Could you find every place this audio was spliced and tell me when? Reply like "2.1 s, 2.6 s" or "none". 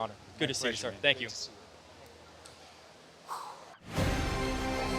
3.8 s